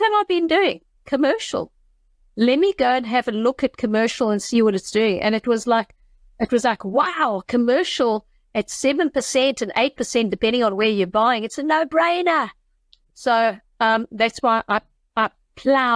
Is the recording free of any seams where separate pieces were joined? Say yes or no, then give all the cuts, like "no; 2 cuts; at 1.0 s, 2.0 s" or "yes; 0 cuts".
yes; 0 cuts